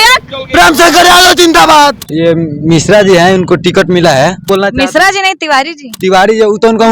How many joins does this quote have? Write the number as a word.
two